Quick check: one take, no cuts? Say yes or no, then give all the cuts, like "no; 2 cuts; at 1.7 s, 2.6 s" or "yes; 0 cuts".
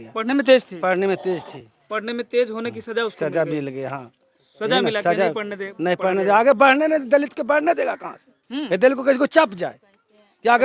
yes; 0 cuts